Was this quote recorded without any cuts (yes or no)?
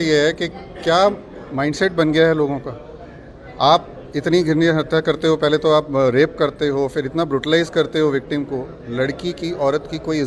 yes